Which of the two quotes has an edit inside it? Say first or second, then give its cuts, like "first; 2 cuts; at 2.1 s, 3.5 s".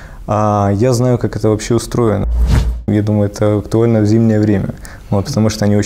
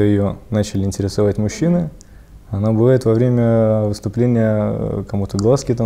first; 1 cut; at 2.7 s